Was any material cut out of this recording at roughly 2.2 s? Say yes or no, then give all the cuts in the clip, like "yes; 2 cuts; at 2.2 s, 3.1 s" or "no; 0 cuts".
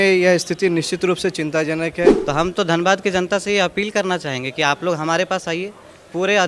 yes; 1 cut; at 2.2 s